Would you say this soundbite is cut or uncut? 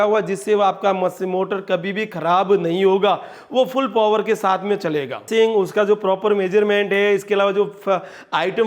cut